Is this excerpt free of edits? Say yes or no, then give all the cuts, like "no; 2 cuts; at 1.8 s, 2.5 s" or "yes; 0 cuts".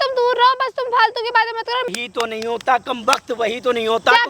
no; 1 cut; at 1.9 s